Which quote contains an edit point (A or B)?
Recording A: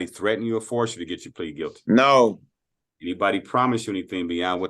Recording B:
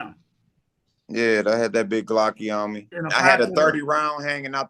B